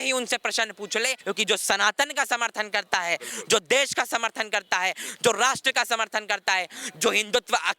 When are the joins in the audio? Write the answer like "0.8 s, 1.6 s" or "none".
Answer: 1.2 s